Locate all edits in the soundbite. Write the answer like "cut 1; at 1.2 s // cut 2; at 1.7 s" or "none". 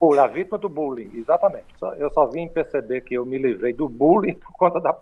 cut 1; at 1.7 s